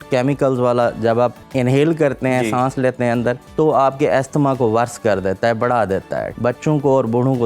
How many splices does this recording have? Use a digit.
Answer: 3